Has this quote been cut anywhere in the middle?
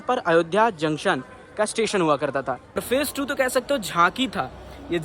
yes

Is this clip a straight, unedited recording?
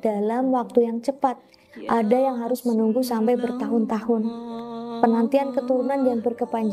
yes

